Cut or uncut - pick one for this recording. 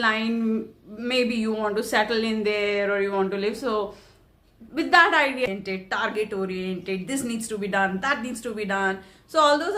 cut